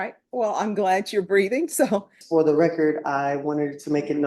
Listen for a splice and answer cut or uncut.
cut